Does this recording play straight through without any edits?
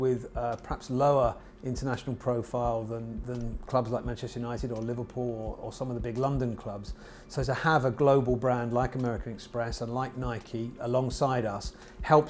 yes; 0 cuts

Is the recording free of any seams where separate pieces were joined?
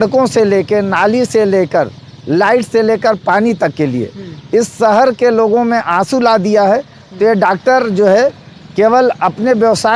yes; 0 cuts

